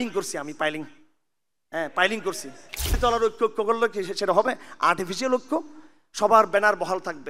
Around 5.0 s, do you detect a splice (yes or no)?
no